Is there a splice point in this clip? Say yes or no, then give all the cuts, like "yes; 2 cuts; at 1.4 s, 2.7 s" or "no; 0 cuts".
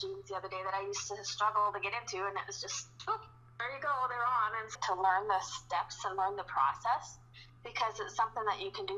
yes; 1 cut; at 4.7 s